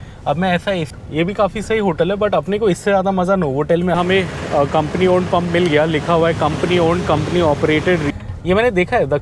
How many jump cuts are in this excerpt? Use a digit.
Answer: 3